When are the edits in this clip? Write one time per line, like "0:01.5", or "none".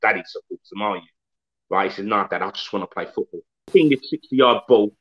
0:03.6